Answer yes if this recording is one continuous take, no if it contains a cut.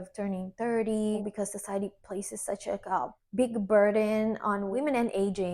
no